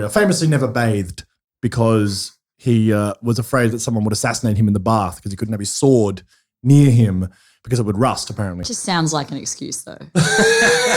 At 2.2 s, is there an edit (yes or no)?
no